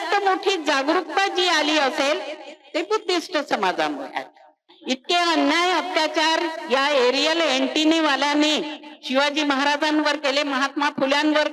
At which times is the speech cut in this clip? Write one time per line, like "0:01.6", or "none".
0:04.7